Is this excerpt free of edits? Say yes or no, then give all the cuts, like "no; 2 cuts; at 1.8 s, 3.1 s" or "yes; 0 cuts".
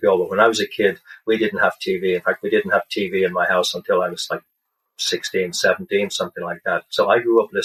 yes; 0 cuts